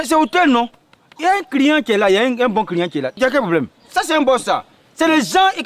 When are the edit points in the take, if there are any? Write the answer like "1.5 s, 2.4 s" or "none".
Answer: 3.8 s